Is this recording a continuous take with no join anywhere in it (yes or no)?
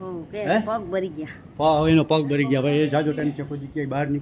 yes